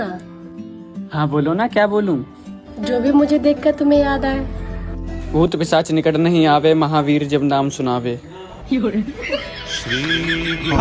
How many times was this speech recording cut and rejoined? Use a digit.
0